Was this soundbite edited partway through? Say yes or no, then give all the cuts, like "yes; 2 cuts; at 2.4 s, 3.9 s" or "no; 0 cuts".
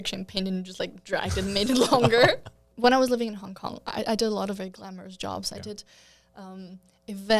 yes; 1 cut; at 2.6 s